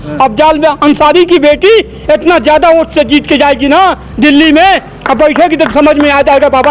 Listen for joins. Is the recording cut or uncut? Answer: uncut